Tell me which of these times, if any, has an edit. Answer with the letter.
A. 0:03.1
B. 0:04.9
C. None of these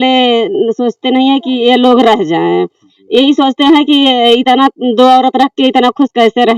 C